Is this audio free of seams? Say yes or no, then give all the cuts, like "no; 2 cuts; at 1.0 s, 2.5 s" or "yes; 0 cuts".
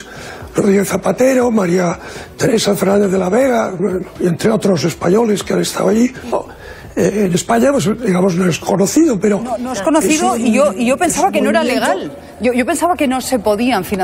no; 1 cut; at 6.3 s